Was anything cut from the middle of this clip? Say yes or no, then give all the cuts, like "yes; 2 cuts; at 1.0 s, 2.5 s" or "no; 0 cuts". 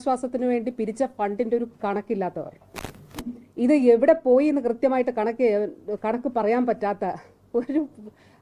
no; 0 cuts